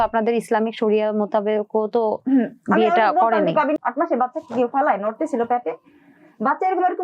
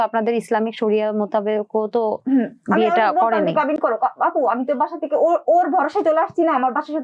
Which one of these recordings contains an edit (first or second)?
first